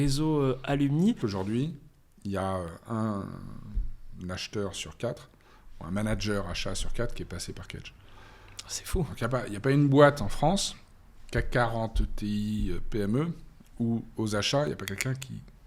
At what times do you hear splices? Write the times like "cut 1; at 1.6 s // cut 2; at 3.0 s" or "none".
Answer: cut 1; at 1.2 s